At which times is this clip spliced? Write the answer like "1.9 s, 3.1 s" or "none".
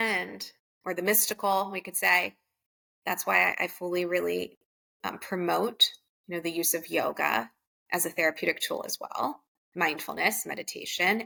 none

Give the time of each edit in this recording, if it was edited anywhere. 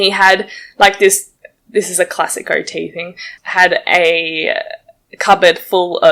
none

